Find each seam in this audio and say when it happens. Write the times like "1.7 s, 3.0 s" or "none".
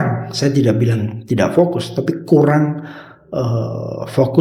none